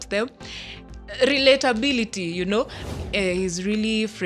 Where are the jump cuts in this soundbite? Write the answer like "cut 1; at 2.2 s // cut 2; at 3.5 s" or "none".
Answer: cut 1; at 2.8 s

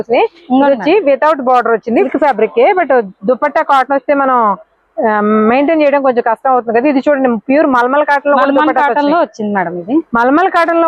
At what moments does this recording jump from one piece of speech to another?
cut 1; at 2.1 s

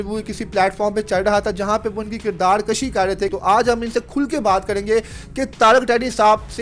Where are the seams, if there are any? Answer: cut 1; at 3.3 s

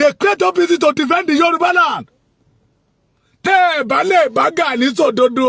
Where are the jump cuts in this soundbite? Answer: none

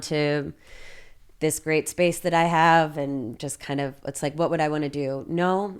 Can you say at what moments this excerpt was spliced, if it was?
none

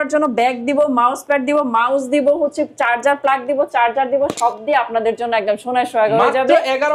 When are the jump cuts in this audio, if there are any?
none

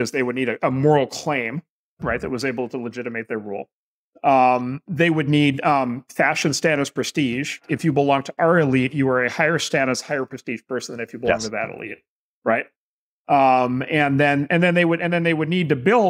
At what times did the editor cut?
cut 1; at 2.0 s // cut 2; at 7.6 s

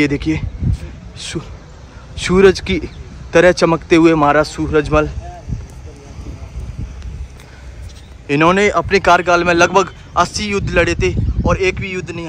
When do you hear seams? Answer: none

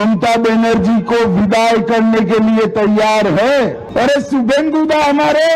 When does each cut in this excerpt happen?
cut 1; at 3.8 s

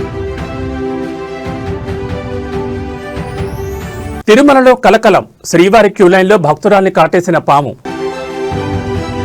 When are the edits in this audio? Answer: cut 1; at 4.2 s

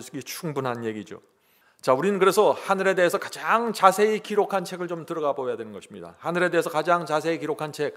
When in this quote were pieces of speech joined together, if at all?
none

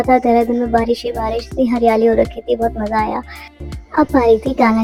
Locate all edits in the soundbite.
none

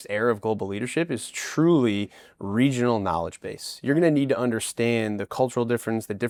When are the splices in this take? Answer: none

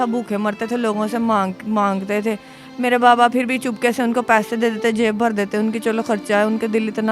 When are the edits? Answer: none

